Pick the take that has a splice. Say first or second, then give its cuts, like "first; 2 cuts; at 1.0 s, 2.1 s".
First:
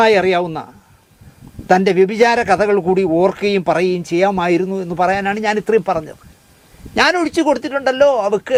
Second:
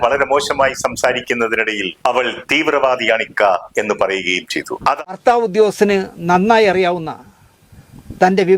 second; 1 cut; at 5.1 s